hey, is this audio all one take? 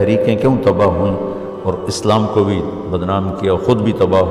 yes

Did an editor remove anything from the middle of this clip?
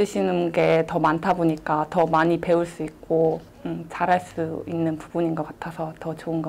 no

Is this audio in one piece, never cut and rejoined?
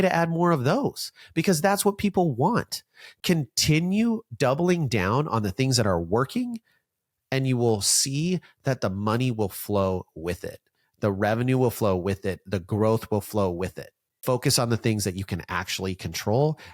yes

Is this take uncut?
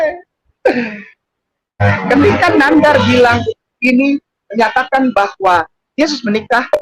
no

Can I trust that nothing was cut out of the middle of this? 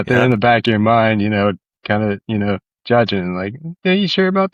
yes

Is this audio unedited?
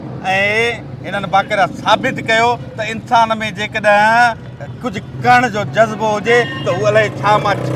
yes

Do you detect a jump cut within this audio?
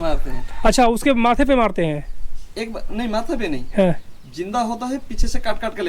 no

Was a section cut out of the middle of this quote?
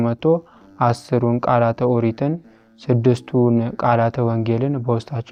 no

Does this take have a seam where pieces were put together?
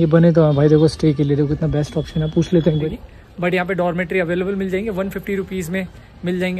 yes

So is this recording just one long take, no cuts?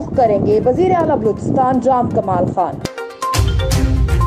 no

